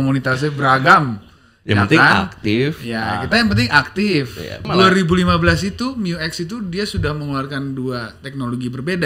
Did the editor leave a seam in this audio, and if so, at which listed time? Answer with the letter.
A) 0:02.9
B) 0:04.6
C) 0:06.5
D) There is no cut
B